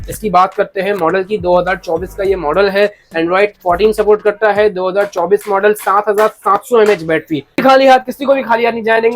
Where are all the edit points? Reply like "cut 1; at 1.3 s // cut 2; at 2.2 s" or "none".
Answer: cut 1; at 7.6 s